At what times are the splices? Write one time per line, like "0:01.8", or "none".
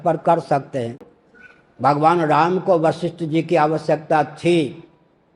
0:01.0